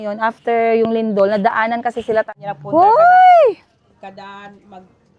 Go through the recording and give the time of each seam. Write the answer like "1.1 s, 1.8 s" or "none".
2.3 s